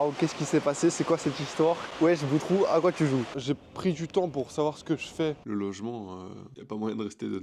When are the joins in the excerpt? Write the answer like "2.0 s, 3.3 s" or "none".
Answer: 3.3 s, 5.4 s

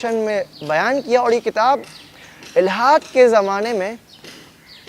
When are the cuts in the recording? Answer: none

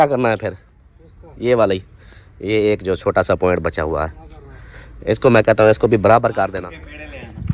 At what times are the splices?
6.5 s

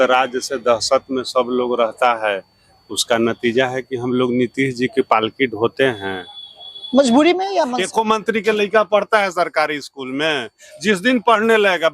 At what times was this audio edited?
7.8 s

